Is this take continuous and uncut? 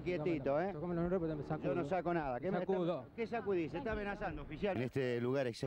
no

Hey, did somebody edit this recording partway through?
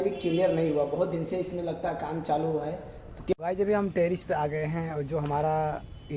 yes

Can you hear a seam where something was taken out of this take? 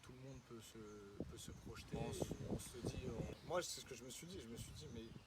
yes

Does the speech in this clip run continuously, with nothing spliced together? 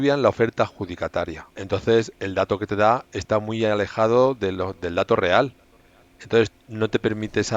no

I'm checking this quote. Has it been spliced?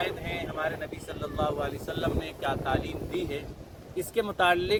no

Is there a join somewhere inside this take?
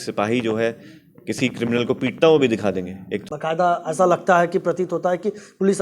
yes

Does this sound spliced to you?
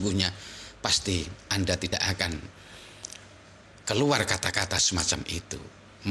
no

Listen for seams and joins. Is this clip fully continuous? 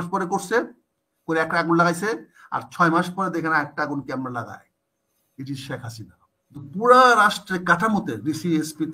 no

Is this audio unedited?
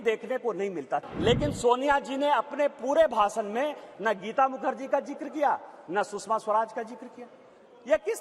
no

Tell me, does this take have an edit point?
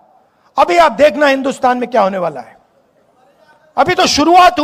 no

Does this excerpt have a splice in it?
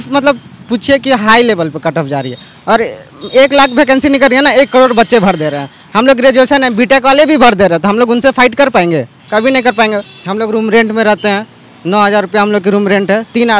yes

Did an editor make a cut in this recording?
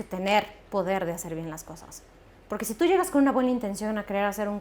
no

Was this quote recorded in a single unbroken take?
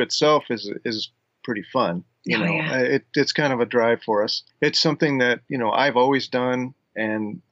no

